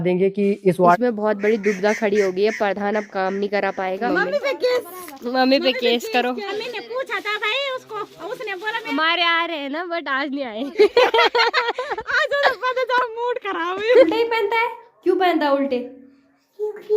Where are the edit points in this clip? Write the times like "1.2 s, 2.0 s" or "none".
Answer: 1.0 s, 4.0 s, 6.5 s, 8.9 s, 14.0 s